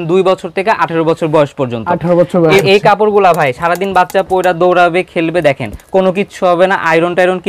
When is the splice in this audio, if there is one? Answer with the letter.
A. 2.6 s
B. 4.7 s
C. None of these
A